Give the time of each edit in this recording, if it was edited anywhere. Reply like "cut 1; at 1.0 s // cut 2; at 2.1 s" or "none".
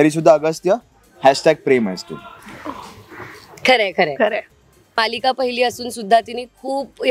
cut 1; at 4.9 s

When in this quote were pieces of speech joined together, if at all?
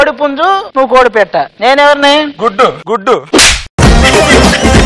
none

